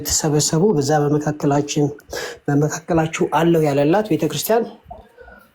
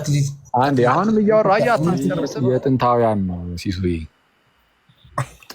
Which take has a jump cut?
second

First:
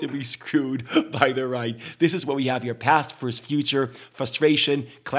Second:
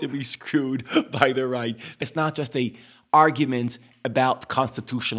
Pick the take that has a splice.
second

